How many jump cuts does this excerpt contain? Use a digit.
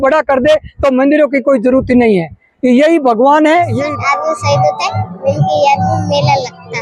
1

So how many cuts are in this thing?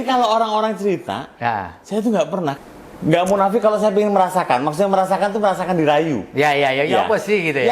1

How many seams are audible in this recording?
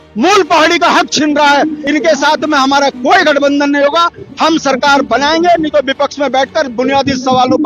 1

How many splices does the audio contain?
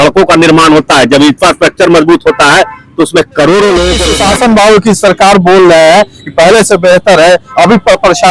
1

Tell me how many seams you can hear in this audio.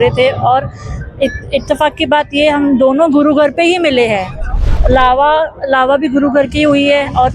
1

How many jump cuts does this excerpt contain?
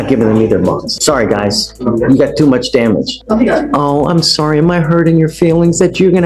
2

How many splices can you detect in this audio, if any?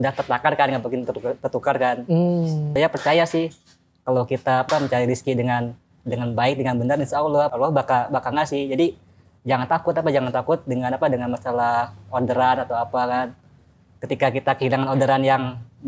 3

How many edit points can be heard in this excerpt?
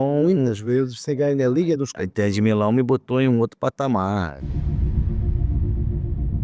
1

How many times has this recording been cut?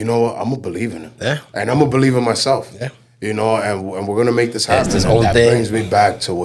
1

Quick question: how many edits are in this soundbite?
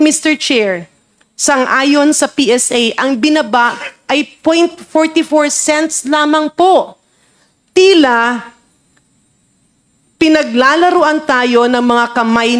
0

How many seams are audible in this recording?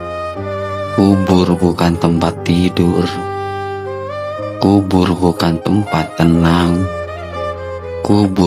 1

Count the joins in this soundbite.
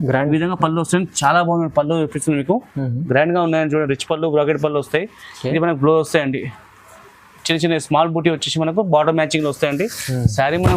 0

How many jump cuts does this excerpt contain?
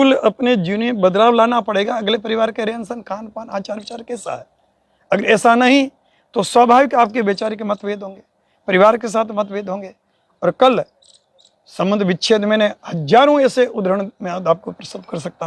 0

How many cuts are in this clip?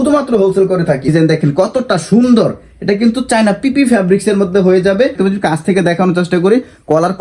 2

